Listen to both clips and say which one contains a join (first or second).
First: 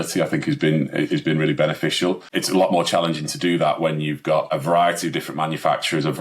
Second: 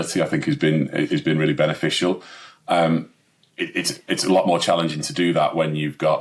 first